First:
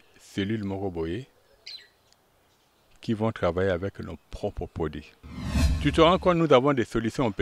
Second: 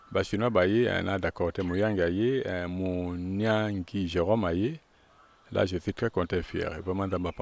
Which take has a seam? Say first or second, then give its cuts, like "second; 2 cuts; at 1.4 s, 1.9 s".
first; 1 cut; at 5.7 s